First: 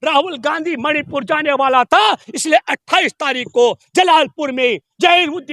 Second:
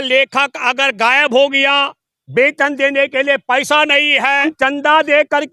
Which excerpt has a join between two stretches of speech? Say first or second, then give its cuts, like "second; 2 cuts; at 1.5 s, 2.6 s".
second; 1 cut; at 4.4 s